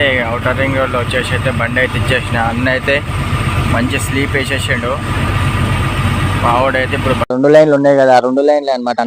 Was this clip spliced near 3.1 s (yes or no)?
no